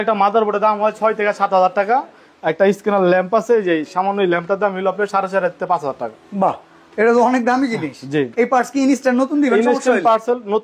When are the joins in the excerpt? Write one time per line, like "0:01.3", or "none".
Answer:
none